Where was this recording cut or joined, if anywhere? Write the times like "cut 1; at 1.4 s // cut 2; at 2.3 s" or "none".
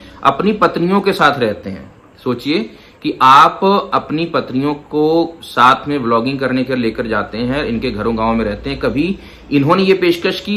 none